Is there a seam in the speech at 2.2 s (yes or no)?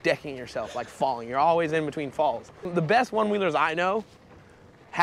yes